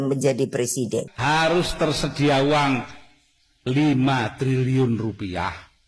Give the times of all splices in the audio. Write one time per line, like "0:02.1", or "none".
0:01.1